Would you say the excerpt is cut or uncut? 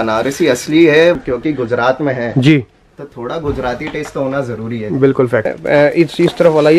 cut